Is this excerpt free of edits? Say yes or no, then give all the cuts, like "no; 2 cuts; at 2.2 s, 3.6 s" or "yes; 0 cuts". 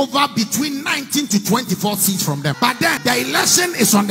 no; 1 cut; at 2.8 s